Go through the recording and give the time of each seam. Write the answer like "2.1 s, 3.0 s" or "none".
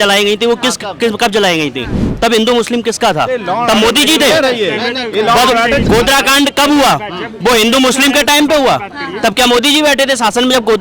5.8 s